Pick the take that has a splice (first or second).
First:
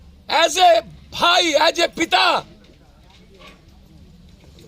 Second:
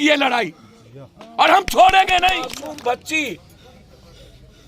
second